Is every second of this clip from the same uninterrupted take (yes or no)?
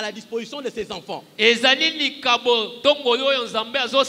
yes